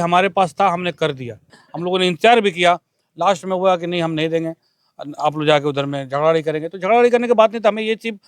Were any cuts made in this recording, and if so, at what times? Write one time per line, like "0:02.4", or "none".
0:01.6